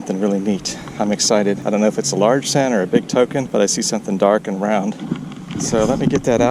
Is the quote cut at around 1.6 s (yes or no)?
yes